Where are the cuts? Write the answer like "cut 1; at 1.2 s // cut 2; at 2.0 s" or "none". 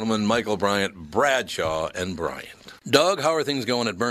cut 1; at 2.8 s